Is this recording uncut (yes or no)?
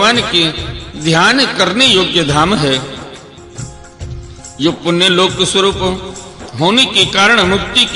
no